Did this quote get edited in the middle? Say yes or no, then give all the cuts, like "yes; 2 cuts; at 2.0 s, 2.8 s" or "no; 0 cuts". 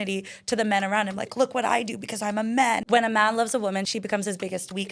yes; 2 cuts; at 2.8 s, 3.9 s